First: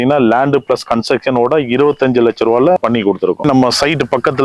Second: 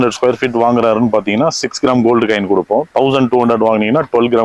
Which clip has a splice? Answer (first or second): first